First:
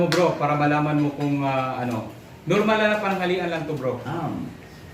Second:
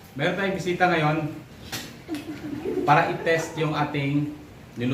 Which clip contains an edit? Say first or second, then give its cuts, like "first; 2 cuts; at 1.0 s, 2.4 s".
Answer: first; 1 cut; at 4.0 s